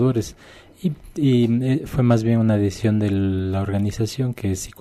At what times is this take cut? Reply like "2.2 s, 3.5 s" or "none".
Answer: 1.5 s